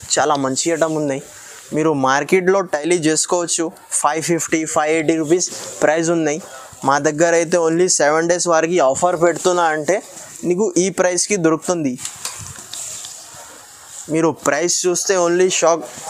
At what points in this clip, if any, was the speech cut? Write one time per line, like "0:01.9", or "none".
none